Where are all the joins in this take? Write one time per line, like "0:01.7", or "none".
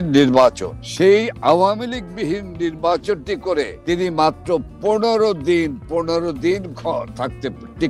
none